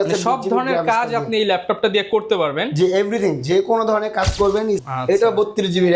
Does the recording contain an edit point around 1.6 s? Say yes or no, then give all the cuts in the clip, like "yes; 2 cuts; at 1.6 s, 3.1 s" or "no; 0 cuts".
no; 1 cut; at 4.8 s